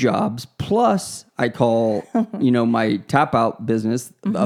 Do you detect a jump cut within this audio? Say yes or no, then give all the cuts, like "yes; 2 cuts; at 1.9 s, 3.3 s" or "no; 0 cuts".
no; 0 cuts